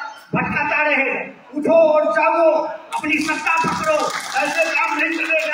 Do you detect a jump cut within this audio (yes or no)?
yes